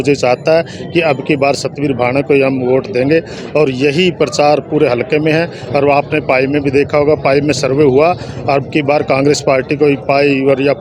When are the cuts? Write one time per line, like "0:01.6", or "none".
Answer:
none